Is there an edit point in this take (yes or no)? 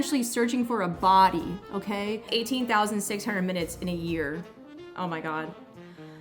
yes